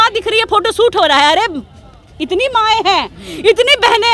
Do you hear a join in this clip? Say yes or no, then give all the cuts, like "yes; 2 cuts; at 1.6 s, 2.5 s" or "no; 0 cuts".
no; 0 cuts